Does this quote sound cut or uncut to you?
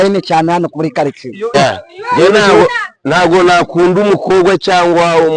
cut